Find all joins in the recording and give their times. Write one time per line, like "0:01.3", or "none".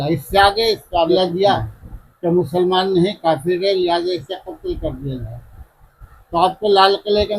0:01.1